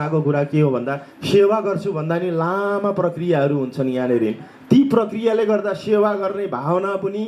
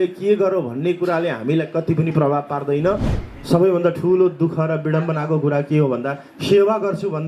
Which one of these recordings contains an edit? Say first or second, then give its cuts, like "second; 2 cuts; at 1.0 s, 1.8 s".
second; 1 cut; at 3.2 s